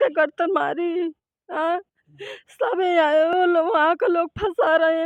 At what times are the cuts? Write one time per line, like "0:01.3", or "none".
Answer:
none